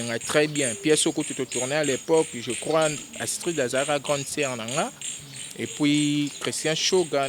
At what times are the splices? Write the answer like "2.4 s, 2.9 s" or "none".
none